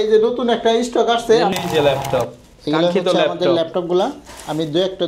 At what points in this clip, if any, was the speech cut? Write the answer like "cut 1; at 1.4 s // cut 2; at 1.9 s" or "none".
cut 1; at 1.5 s

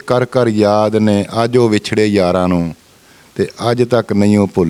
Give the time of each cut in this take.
none

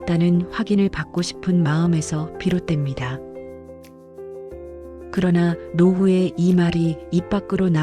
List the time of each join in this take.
cut 1; at 3.9 s // cut 2; at 5.1 s

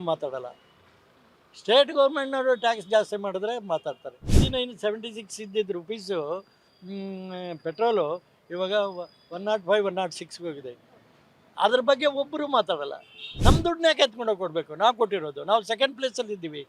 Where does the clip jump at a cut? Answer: cut 1; at 4.3 s // cut 2; at 13.3 s

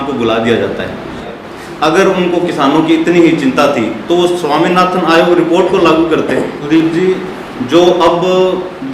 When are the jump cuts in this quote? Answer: cut 1; at 1.3 s // cut 2; at 6.6 s

